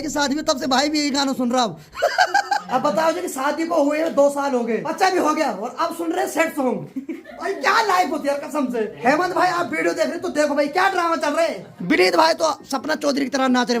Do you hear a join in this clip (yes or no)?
yes